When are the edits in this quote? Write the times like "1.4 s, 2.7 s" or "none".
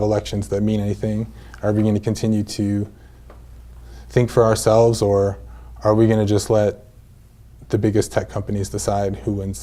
none